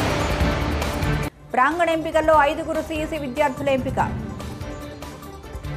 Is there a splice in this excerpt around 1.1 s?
yes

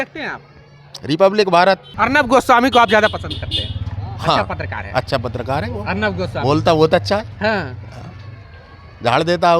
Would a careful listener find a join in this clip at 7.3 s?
no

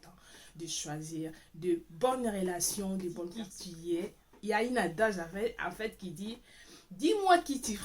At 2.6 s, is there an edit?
no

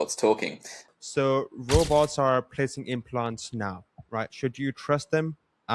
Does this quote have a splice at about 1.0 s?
yes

